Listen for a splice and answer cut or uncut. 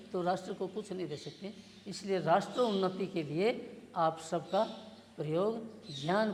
uncut